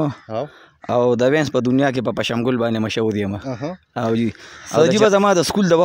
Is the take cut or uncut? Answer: cut